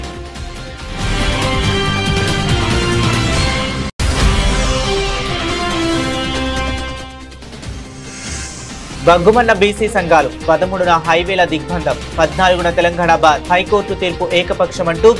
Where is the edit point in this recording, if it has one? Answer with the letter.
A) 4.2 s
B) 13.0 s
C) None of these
C